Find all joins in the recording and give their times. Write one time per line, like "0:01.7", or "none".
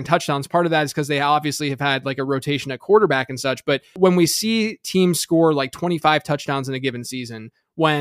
0:03.9